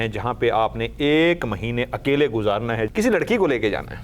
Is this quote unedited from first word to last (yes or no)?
no